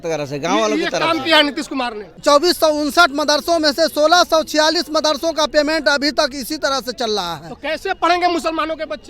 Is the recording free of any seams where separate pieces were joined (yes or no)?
no